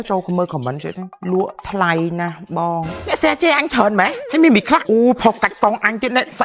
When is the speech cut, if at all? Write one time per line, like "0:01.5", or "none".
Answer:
0:01.1
0:02.9
0:04.2
0:04.8